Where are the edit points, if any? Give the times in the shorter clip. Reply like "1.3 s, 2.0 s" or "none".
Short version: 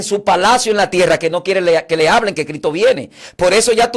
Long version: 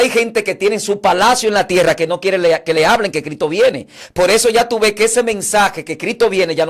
none

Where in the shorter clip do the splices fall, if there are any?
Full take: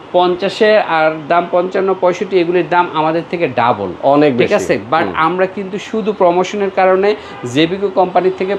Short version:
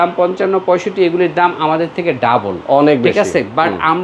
none

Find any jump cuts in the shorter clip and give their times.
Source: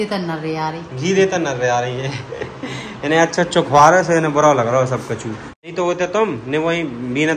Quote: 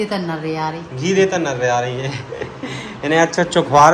none

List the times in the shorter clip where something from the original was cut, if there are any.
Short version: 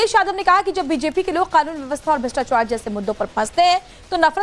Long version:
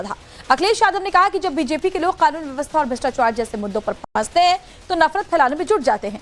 3.3 s

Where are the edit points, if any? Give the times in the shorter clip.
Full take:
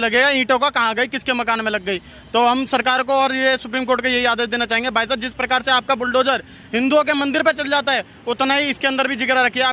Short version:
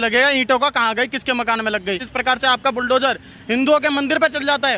2.1 s

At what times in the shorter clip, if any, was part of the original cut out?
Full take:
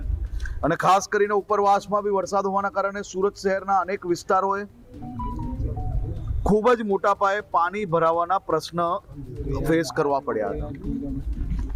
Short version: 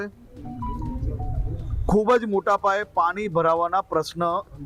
none

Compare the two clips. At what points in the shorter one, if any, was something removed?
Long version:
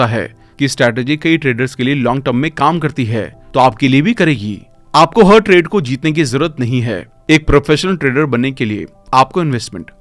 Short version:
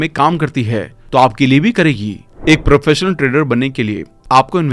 2.3 s

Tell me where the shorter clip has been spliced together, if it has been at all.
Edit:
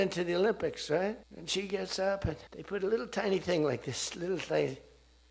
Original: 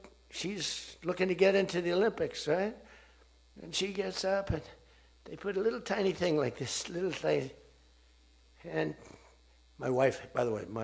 1.3 s, 2.5 s

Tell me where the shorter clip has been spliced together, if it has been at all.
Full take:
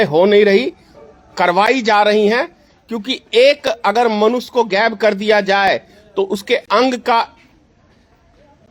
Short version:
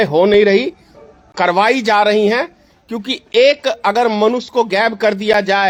none

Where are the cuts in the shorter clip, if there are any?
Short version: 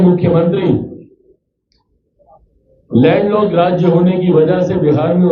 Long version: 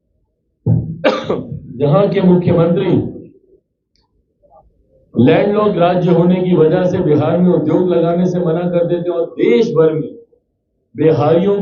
none

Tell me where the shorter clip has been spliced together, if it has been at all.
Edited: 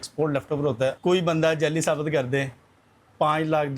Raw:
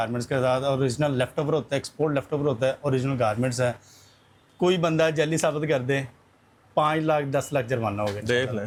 1.0 s

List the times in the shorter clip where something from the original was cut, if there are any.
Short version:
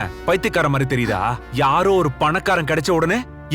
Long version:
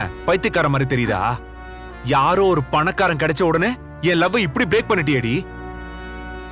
1.4 s

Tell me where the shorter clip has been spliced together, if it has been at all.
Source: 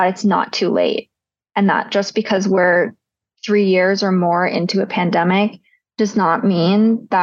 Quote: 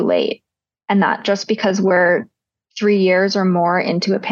none

